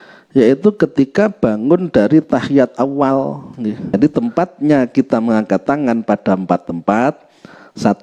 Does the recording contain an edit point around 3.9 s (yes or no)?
yes